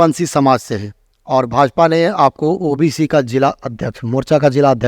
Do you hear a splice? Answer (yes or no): no